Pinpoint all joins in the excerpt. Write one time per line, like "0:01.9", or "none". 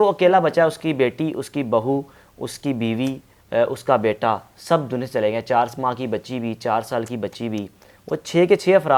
none

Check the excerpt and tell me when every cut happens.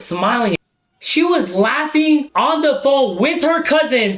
0:01.0
0:02.3

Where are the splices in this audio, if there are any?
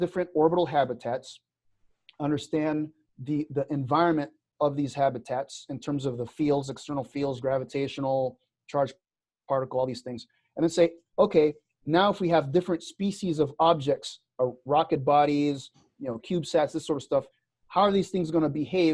0:04.5

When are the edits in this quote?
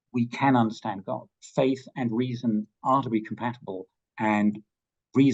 0:01.4

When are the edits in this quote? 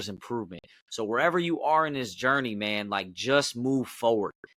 none

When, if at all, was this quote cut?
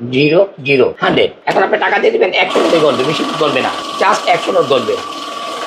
0:01.2
0:03.8

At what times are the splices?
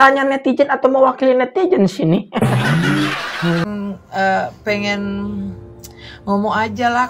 0:03.6

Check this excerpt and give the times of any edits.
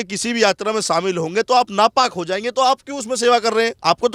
none

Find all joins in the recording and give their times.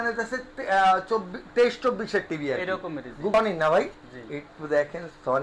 0:03.3

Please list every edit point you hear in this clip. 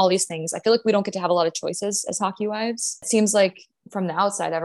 0:03.1

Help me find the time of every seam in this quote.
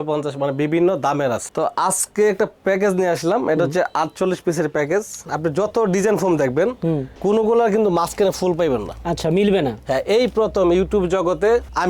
0:01.5
0:05.2

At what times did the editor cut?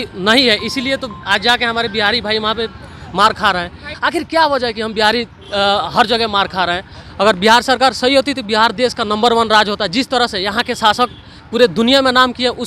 0:03.9

